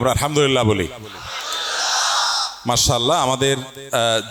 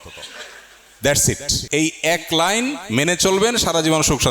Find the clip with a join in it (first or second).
second